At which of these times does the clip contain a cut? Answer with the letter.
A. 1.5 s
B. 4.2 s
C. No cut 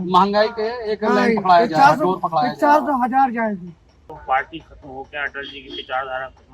B